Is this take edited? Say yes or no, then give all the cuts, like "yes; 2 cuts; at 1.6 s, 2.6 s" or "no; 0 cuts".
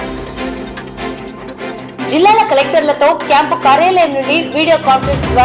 no; 0 cuts